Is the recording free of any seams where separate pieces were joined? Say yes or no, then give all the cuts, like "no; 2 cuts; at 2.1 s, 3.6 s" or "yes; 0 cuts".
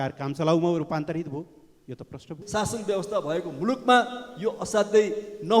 no; 1 cut; at 2.4 s